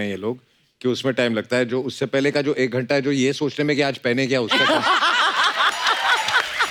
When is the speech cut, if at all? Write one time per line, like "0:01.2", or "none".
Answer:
none